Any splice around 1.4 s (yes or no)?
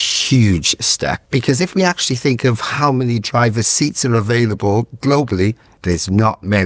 yes